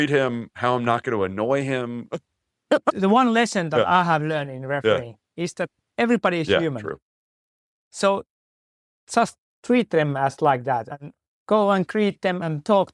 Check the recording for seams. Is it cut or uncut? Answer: cut